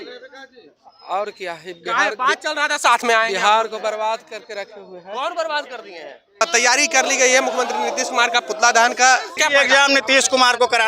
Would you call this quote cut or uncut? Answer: cut